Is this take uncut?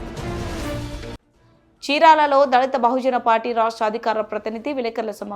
no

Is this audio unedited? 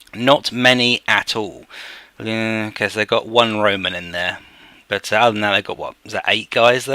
no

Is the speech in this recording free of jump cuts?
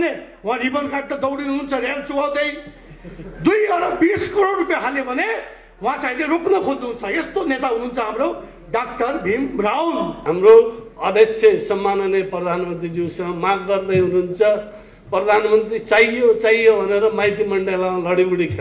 no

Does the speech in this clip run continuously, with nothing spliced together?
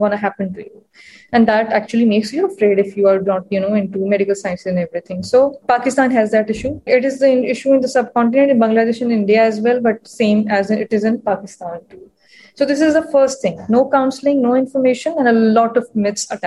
no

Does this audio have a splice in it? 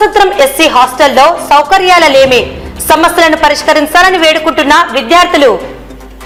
no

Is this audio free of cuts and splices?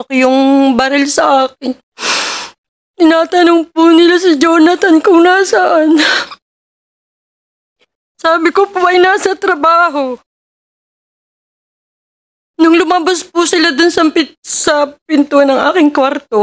yes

